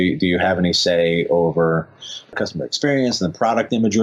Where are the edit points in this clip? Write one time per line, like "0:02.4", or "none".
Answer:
0:02.4